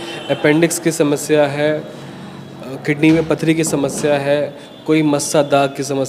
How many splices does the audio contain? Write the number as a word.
zero